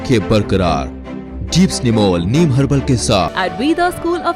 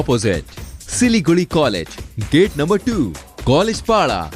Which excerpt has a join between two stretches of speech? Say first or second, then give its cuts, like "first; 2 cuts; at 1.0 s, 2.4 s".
first; 1 cut; at 3.3 s